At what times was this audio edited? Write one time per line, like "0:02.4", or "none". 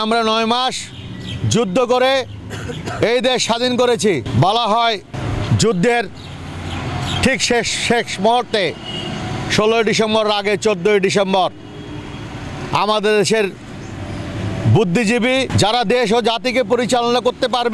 0:04.3
0:05.2
0:15.5

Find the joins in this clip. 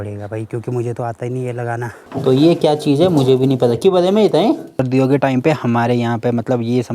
0:01.9
0:04.8

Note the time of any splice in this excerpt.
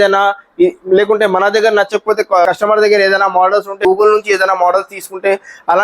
0:02.5
0:03.8

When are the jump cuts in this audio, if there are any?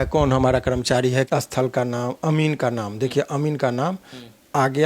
0:01.3

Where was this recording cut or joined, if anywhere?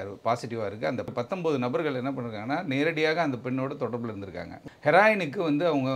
0:01.1
0:04.6

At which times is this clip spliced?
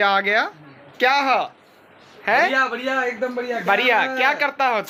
none

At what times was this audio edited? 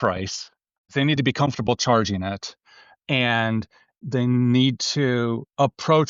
0:01.2
0:04.0

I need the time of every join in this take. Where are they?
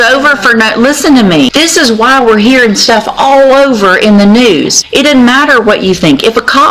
0:01.5
0:04.8

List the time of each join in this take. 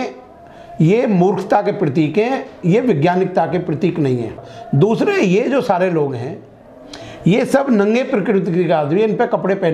0:04.4

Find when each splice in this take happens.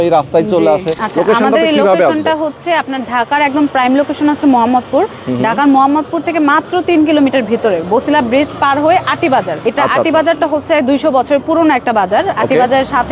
0:01.0
0:09.5

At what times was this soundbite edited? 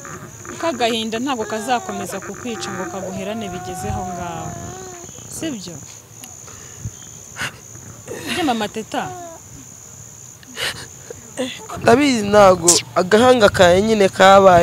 0:11.6

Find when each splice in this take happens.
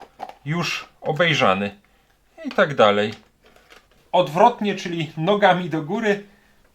0:03.9

